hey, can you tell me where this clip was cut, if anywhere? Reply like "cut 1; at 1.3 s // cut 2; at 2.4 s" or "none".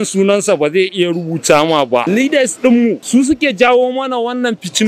cut 1; at 2.1 s // cut 2; at 3.0 s